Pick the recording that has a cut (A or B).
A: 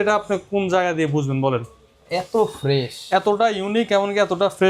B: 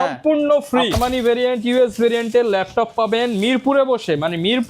B